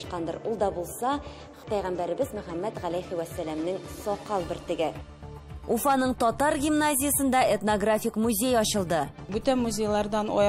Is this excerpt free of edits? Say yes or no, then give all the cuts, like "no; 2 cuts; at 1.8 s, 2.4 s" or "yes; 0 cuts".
no; 1 cut; at 5.1 s